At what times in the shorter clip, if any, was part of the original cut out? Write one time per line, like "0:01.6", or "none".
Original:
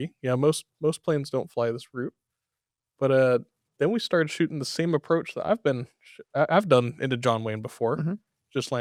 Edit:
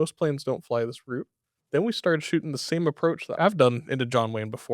0:01.5
0:03.4

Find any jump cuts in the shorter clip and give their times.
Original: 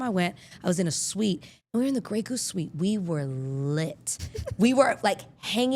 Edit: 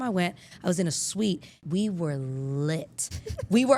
0:01.6

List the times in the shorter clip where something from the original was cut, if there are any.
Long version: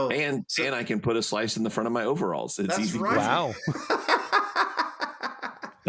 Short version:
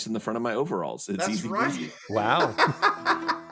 none

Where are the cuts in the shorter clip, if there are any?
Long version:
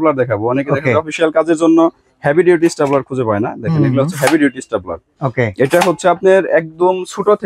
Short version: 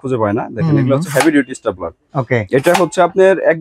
none

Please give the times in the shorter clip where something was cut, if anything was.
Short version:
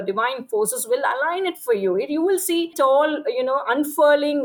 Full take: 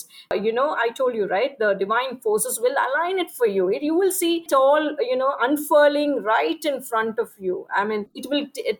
none

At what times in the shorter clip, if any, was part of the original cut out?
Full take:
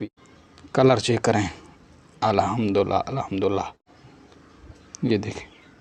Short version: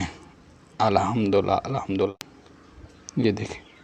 0:02.1

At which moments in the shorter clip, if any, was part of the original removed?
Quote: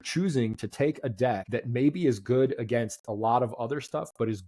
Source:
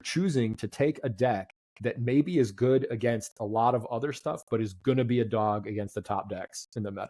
0:01.4

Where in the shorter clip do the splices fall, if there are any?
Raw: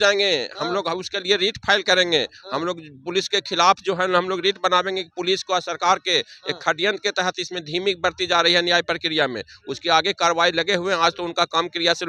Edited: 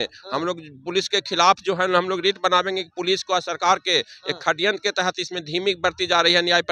none

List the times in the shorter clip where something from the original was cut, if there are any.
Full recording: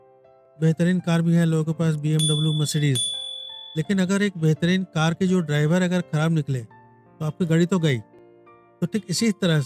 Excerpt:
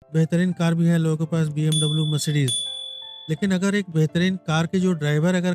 none

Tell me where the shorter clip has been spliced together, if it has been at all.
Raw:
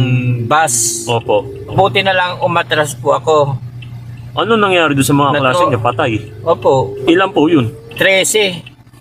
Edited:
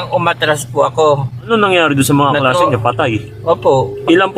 0:01.4

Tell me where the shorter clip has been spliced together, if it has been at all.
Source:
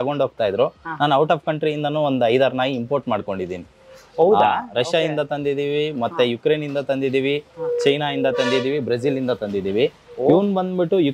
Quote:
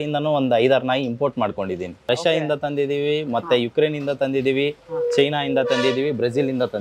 0:02.0

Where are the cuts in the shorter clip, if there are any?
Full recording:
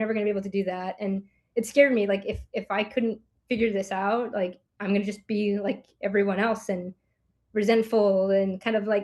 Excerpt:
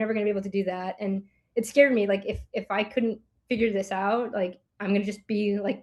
none

